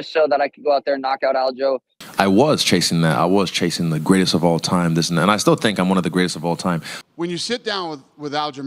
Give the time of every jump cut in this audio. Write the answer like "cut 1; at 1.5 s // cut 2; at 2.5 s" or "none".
cut 1; at 2.0 s // cut 2; at 6.9 s